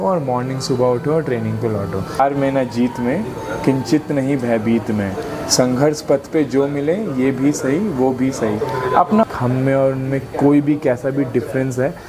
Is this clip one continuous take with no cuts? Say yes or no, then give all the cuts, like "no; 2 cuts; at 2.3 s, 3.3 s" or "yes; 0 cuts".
no; 2 cuts; at 2.2 s, 9.2 s